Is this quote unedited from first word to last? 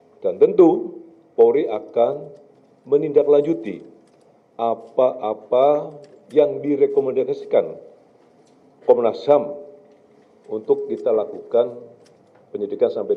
yes; 0 cuts

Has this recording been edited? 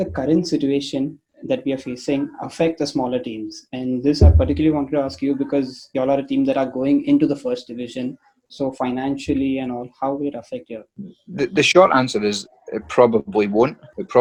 no; 0 cuts

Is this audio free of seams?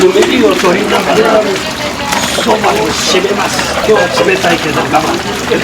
no; 1 cut; at 3.8 s

